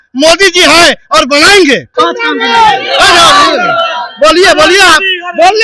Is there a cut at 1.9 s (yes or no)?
yes